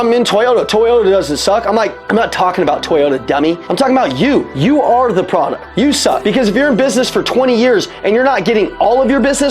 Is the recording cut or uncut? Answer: cut